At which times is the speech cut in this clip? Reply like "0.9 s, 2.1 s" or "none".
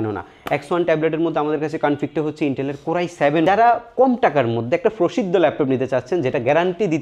3.5 s

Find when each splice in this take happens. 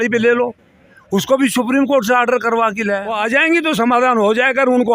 3.1 s

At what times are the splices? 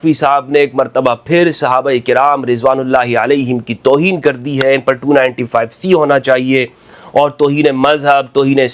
none

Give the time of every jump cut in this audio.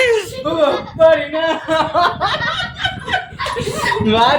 none

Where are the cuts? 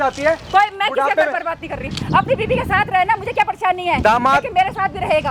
none

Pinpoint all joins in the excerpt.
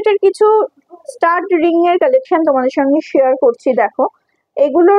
none

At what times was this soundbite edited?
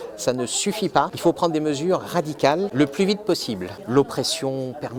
1.1 s, 2.7 s, 3.7 s

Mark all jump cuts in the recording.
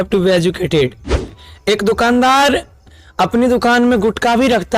1.4 s

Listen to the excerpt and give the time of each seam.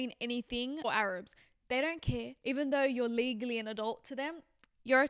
0.8 s, 2.3 s

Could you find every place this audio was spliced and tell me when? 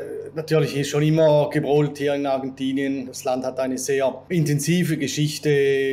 3.1 s, 4.2 s

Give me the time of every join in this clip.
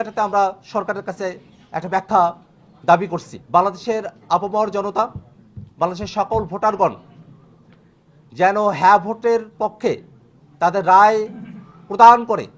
3.3 s

